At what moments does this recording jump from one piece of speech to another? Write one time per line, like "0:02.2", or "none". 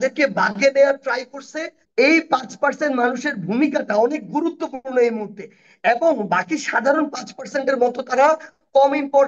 0:01.8